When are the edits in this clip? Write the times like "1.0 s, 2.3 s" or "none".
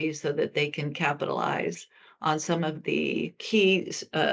3.4 s